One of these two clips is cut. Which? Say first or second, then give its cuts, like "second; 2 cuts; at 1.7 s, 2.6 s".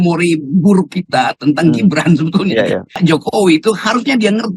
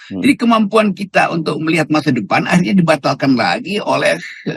first; 1 cut; at 3.0 s